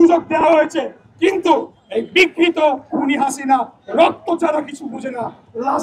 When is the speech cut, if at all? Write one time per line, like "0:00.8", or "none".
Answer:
none